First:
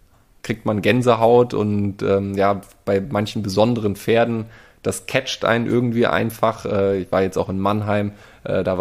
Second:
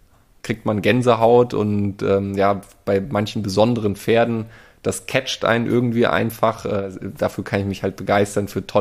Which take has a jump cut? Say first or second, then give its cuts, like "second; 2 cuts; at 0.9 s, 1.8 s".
second; 1 cut; at 6.9 s